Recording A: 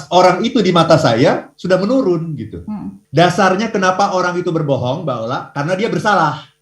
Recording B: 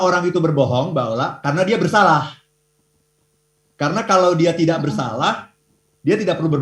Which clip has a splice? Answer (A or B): A